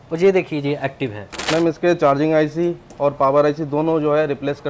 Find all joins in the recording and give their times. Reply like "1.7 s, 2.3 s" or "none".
1.3 s